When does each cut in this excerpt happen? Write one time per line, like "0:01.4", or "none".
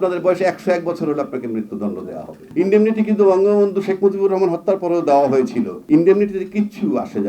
0:02.4
0:05.8